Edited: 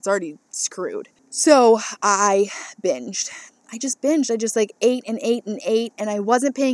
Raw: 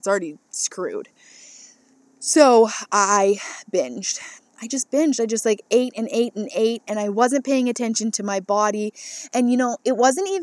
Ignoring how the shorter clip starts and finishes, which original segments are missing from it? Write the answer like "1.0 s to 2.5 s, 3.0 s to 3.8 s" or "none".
1.2 s to 2.1 s

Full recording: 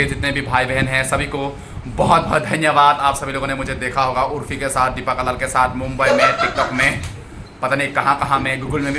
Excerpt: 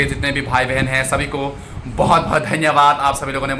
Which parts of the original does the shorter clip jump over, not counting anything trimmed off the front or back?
none

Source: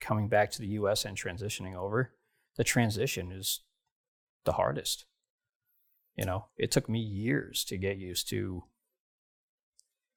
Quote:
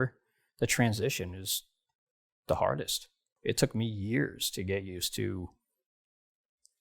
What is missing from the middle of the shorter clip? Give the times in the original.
5.3 s to 6.5 s

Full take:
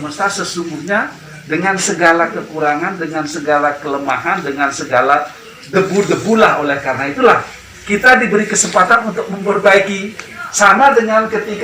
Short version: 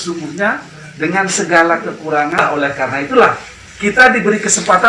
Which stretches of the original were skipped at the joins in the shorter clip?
2.9 s to 6.5 s

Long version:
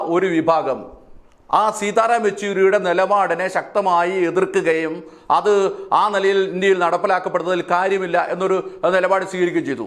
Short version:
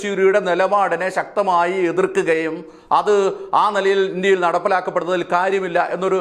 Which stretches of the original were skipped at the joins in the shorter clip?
none

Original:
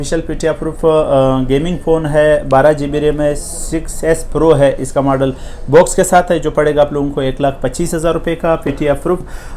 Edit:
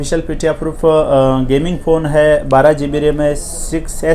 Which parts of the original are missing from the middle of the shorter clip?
none

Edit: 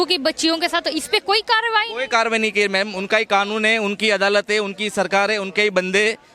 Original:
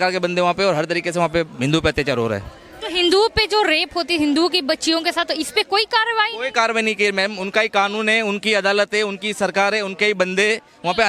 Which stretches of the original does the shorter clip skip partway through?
none

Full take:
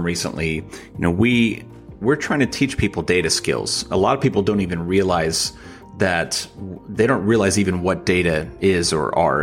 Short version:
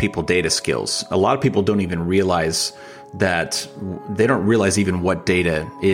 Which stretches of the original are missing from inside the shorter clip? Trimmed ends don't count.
none

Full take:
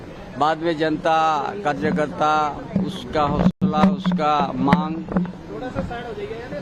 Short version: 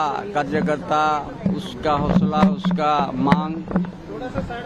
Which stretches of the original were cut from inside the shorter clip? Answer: 3.5 s to 3.6 s

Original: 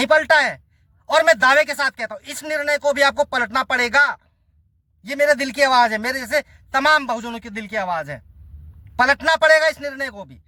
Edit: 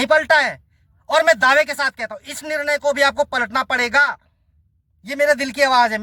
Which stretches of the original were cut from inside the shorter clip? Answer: none

